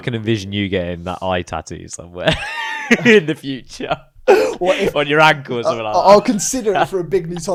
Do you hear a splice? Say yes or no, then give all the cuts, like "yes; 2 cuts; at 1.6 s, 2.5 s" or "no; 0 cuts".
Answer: no; 0 cuts